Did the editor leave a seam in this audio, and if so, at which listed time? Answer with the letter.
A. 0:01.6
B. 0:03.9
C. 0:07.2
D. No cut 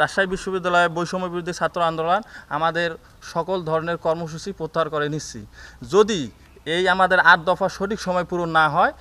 D